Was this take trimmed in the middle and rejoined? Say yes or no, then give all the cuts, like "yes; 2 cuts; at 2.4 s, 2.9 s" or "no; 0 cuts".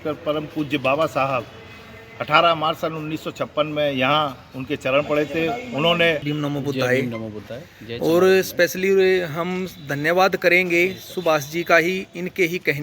yes; 1 cut; at 6.3 s